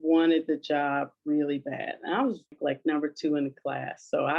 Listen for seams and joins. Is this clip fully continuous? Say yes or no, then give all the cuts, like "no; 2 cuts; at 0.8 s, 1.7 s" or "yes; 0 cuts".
no; 1 cut; at 2.6 s